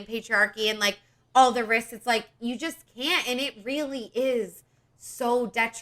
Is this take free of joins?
yes; 0 cuts

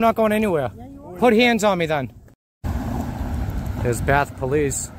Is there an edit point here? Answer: yes; 1 cut; at 2.7 s

